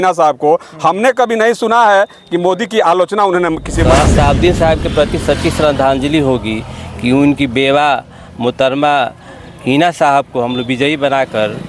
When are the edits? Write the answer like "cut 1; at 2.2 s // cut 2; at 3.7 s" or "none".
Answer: cut 1; at 3.9 s